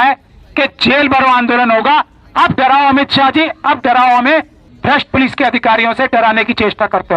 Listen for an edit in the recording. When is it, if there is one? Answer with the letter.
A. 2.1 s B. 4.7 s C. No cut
B